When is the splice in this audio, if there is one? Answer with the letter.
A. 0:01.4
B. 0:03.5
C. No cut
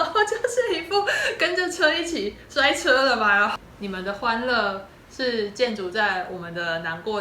B